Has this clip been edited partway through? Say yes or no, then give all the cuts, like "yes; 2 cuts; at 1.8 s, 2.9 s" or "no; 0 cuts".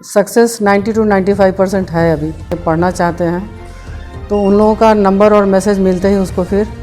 yes; 1 cut; at 2.6 s